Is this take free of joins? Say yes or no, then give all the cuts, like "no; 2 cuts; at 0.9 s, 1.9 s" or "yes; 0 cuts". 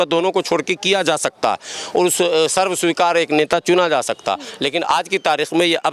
yes; 0 cuts